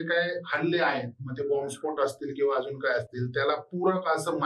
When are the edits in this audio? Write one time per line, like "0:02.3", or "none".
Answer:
none